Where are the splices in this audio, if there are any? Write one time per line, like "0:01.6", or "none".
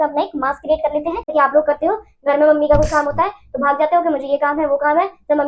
0:01.3